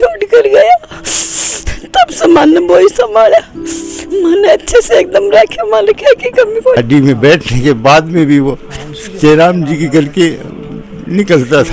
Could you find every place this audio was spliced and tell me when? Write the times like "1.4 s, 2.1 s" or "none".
6.8 s